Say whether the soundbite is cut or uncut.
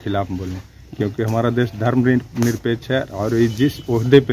uncut